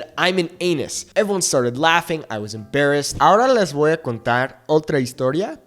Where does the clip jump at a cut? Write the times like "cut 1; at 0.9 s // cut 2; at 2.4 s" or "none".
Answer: cut 1; at 3.1 s